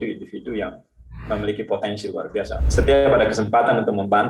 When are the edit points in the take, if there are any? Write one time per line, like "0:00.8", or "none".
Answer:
0:02.5